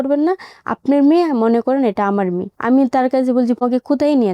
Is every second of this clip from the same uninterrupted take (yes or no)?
no